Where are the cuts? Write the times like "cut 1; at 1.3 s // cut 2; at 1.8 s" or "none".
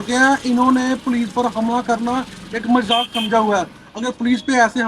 cut 1; at 3.8 s